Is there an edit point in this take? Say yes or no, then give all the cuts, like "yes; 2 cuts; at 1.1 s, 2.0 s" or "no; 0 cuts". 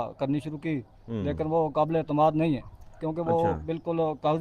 no; 0 cuts